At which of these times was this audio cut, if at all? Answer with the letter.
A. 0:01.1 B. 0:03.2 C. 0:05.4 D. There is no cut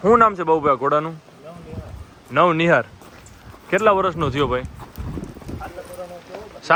D